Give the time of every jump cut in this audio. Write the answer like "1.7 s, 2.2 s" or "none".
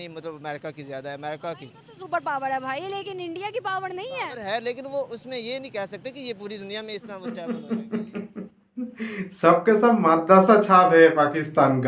7.3 s